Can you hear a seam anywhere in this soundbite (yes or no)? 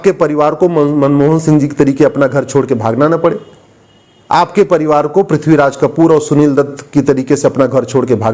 no